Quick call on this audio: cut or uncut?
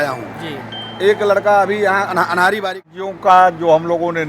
cut